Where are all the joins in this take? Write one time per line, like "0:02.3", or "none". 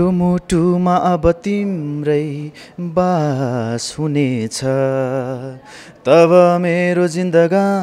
none